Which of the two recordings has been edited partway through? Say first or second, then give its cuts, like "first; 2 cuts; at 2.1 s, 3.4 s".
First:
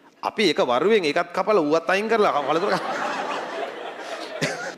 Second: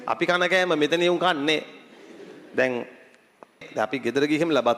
second; 1 cut; at 3.7 s